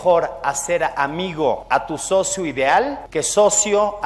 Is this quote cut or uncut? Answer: cut